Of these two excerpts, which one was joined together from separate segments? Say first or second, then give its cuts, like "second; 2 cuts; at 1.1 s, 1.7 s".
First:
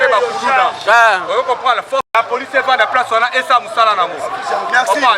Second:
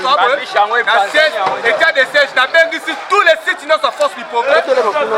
first; 1 cut; at 2.1 s